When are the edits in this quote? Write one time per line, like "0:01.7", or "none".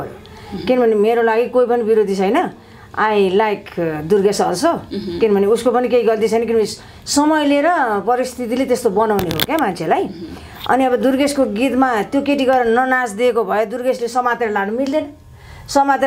none